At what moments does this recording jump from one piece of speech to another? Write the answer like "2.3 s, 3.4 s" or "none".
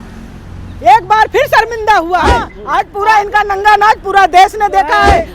2.5 s